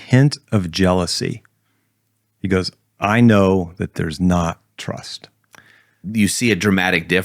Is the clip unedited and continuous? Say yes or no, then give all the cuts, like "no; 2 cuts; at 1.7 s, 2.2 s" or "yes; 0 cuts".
no; 1 cut; at 6.0 s